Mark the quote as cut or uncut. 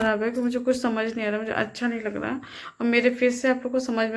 uncut